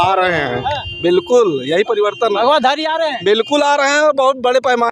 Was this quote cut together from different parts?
no; 0 cuts

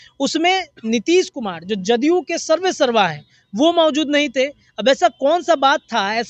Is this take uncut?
yes; 0 cuts

